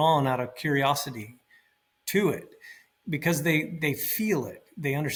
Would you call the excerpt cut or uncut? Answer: uncut